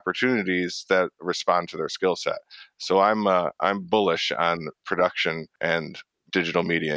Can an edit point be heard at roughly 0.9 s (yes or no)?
no